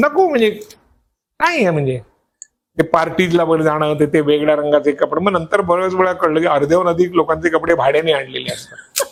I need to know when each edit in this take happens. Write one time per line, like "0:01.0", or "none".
none